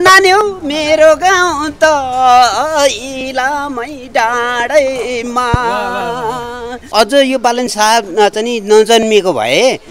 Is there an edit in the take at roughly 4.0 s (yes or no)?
no